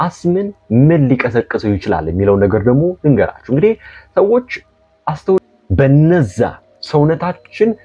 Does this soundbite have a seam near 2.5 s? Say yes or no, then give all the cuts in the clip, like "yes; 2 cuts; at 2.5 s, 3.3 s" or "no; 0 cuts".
no; 1 cut; at 5.4 s